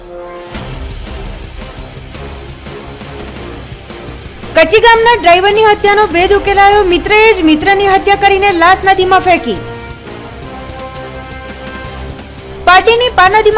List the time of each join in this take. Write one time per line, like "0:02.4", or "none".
0:04.3